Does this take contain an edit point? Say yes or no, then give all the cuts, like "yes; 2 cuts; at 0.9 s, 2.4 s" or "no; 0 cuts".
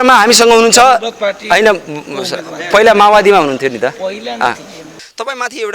yes; 1 cut; at 4.8 s